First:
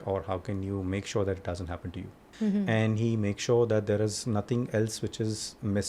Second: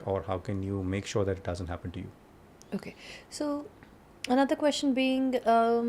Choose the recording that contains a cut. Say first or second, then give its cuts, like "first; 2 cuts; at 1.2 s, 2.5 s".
first; 1 cut; at 2.3 s